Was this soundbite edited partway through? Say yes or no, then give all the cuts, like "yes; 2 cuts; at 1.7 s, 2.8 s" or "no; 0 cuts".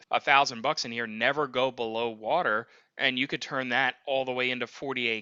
no; 0 cuts